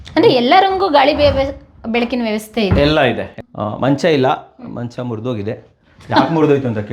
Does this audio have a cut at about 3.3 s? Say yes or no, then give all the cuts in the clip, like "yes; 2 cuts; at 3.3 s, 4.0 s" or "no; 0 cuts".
yes; 1 cut; at 3.3 s